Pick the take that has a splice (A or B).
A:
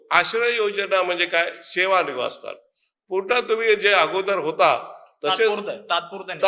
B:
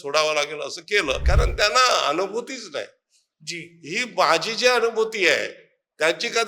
B